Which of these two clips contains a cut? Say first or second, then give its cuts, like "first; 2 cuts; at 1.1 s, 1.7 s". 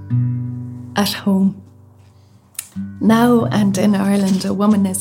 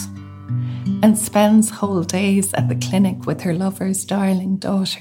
first; 1 cut; at 0.9 s